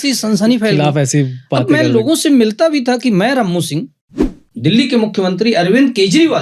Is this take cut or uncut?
cut